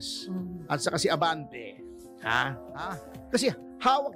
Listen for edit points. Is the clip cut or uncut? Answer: cut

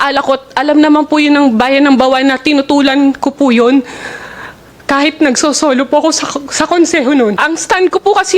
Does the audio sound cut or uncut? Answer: cut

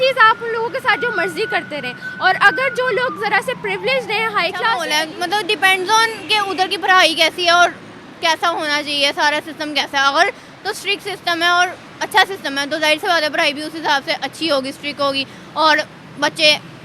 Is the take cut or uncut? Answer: cut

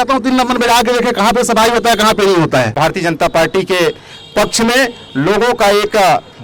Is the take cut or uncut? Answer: cut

